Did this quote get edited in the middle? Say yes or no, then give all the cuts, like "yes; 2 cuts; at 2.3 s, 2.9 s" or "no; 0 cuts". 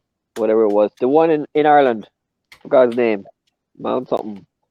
no; 0 cuts